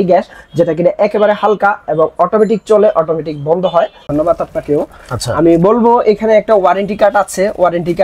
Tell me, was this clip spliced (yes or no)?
yes